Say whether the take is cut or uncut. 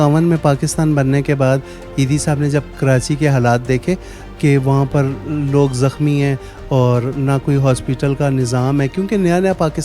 uncut